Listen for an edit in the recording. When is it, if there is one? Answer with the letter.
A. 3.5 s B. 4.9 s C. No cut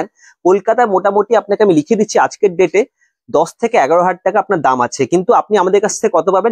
C